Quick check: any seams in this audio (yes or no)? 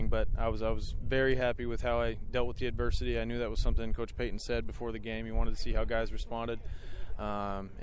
no